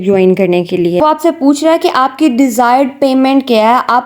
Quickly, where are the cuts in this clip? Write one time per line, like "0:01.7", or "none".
0:01.0